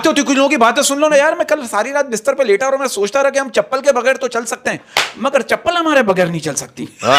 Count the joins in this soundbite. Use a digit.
0